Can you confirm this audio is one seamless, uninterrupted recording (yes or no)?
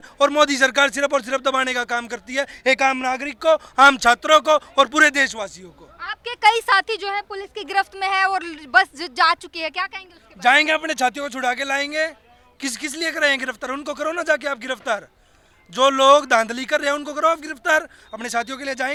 yes